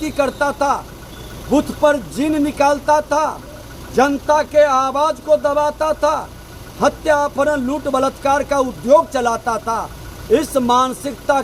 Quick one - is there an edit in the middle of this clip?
no; 0 cuts

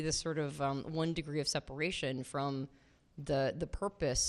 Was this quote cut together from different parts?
no; 0 cuts

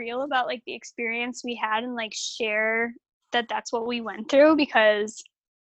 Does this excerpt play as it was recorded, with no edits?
yes; 0 cuts

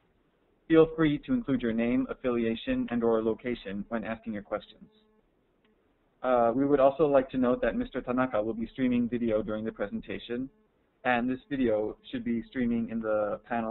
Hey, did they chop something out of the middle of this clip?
yes; 1 cut; at 1.2 s

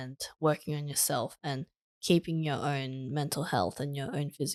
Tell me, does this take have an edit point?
no; 0 cuts

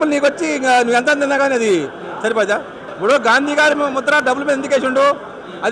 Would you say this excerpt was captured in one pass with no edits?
no; 1 cut; at 2.8 s

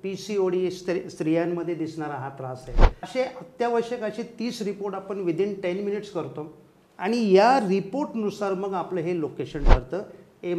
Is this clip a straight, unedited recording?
no; 1 cut; at 3.0 s

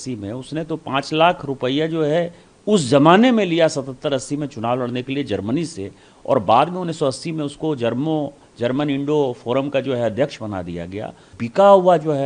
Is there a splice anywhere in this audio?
yes; 1 cut; at 11.3 s

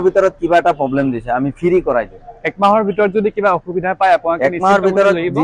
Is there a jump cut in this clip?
no; 0 cuts

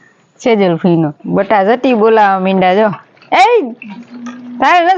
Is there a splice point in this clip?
yes; 1 cut; at 1.2 s

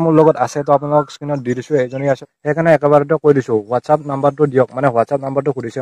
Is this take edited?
yes; 1 cut; at 2.3 s

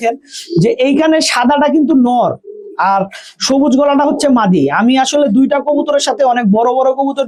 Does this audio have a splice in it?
no; 0 cuts

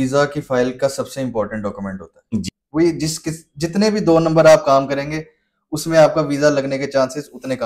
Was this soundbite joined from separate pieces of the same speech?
yes; 1 cut; at 2.5 s

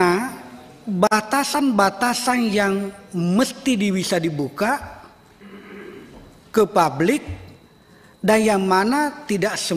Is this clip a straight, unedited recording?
yes; 0 cuts

